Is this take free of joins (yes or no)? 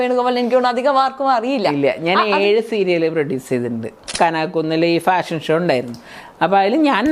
no